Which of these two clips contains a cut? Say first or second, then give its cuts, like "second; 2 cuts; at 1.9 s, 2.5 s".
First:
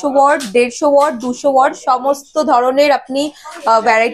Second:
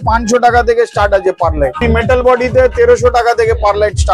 second; 1 cut; at 1.8 s